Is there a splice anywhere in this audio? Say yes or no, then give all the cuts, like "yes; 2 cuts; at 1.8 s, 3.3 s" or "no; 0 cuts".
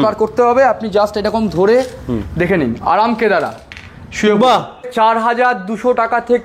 yes; 1 cut; at 4.9 s